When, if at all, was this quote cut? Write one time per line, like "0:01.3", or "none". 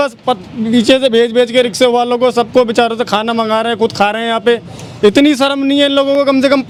none